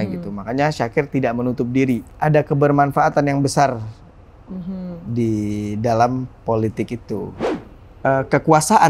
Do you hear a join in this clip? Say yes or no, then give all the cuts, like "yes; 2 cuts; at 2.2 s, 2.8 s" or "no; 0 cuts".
yes; 2 cuts; at 2.1 s, 7.4 s